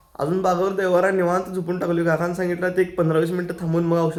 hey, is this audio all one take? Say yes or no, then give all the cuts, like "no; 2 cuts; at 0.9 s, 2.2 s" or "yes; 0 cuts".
yes; 0 cuts